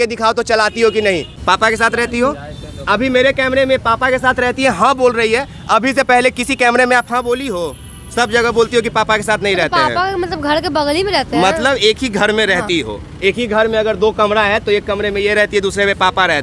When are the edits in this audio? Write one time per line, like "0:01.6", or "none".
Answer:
0:01.3